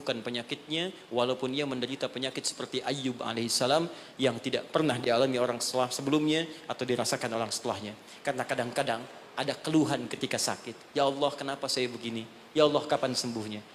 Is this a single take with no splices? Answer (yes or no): yes